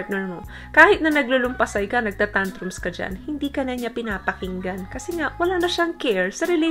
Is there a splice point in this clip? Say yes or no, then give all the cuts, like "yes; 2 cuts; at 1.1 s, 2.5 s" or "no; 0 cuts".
no; 0 cuts